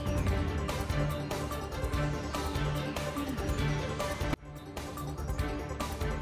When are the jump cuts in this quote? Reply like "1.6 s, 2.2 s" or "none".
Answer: 1.4 s, 2.8 s